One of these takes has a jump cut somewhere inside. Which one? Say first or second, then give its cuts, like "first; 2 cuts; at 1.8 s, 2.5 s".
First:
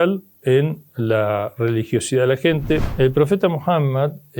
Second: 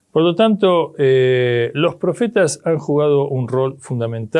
first; 1 cut; at 2.9 s